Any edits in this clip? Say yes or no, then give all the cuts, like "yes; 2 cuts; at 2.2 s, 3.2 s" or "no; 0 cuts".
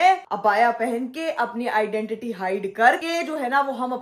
yes; 1 cut; at 3.0 s